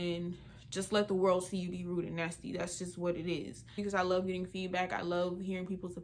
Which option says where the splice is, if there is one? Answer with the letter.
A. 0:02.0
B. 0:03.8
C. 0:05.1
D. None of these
B